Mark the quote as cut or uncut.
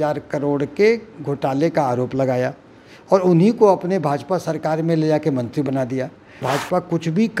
cut